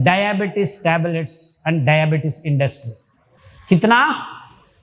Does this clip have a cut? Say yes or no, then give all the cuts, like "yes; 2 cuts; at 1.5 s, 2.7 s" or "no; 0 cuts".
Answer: no; 0 cuts